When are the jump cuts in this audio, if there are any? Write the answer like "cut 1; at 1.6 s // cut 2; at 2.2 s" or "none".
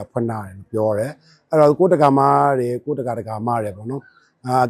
none